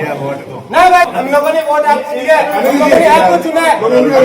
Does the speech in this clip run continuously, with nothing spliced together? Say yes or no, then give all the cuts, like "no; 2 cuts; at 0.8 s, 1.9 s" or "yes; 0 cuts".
no; 1 cut; at 1.1 s